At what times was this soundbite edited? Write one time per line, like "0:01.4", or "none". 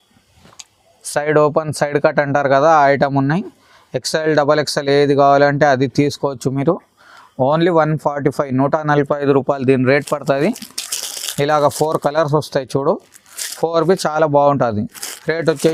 none